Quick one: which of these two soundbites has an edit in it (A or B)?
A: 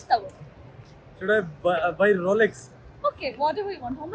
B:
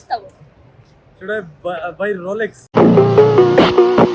A